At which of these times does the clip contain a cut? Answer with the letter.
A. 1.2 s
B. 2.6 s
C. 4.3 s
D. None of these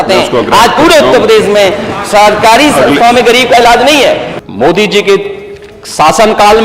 C